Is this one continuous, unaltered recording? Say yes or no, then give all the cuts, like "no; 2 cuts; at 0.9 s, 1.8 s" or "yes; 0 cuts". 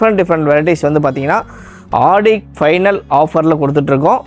yes; 0 cuts